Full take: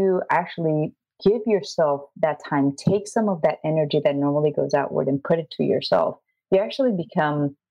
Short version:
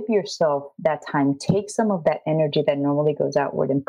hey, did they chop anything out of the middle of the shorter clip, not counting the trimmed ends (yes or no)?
no